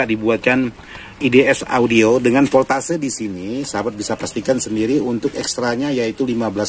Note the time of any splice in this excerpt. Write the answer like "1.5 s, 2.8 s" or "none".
none